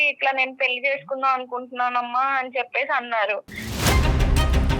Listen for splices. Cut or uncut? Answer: cut